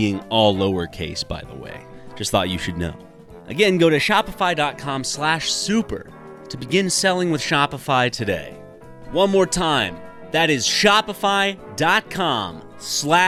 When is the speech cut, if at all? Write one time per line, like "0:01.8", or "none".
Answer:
none